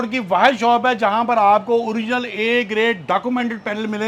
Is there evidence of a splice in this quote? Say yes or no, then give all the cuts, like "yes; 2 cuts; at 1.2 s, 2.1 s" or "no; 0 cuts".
no; 0 cuts